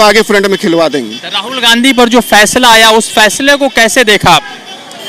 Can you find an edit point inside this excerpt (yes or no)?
no